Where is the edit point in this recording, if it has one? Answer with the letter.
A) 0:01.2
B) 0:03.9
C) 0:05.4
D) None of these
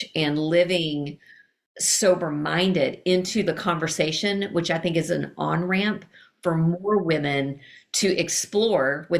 D